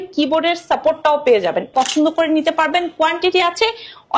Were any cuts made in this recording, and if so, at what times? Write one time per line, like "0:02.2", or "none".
0:01.7